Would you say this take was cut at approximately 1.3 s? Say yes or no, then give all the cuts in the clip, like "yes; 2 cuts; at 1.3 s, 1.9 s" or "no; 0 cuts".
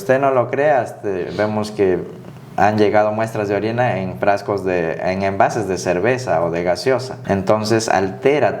no; 1 cut; at 7.1 s